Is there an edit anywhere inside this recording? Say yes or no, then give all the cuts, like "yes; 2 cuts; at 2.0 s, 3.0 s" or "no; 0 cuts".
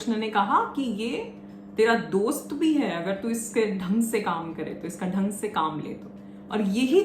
no; 0 cuts